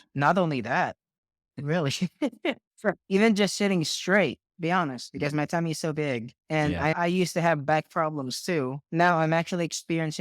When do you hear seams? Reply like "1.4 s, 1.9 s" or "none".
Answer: 7.0 s, 8.8 s